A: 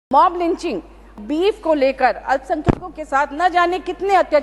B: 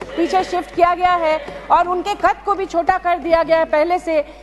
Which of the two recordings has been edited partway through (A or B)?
A